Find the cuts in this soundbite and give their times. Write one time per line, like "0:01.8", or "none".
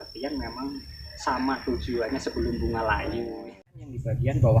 0:03.6